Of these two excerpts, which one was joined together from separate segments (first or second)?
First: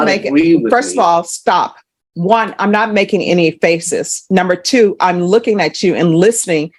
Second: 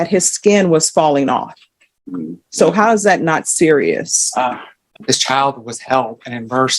second